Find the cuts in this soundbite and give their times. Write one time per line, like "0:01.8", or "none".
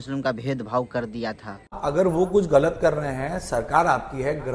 0:01.8